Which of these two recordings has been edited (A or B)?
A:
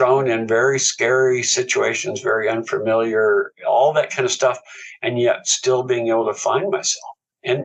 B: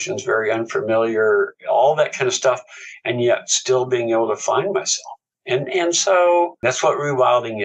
B